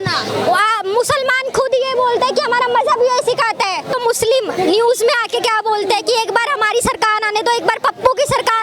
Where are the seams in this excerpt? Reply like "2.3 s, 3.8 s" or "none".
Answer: 3.9 s